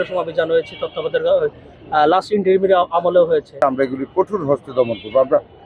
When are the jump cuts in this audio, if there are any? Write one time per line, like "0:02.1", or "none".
0:03.6